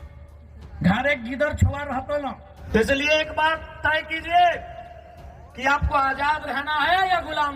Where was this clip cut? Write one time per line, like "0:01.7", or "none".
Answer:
0:02.5